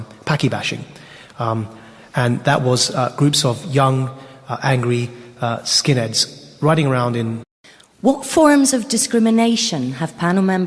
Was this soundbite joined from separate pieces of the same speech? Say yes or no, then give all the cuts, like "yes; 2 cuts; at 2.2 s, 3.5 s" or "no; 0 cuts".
no; 0 cuts